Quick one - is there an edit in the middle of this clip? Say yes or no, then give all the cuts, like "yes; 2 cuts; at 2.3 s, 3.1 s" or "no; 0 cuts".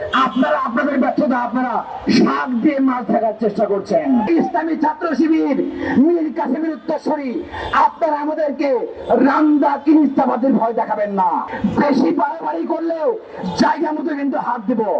yes; 2 cuts; at 4.3 s, 11.5 s